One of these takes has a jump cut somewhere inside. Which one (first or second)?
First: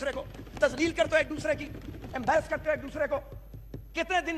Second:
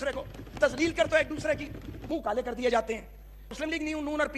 second